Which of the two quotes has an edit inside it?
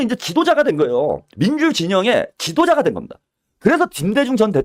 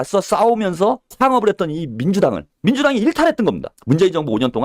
second; 3 cuts; at 1.1 s, 2.5 s, 3.7 s

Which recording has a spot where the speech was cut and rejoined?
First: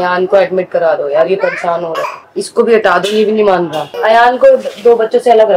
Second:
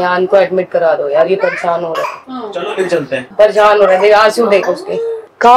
first; 2 cuts; at 2.2 s, 3.9 s

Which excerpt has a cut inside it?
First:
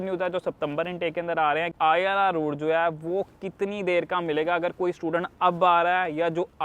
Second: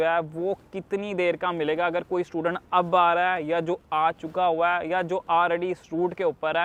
first; 1 cut; at 1.7 s

